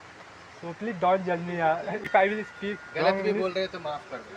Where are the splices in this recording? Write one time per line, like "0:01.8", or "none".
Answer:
0:02.0